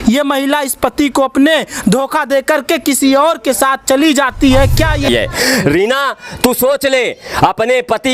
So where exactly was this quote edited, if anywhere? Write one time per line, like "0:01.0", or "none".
0:05.0